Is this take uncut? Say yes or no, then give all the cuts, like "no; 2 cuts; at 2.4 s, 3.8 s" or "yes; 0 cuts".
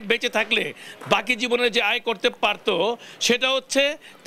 yes; 0 cuts